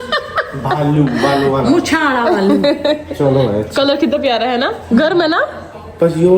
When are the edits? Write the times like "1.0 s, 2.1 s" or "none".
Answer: none